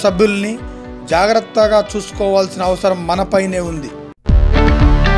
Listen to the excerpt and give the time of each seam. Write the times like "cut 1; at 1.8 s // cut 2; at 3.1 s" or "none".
none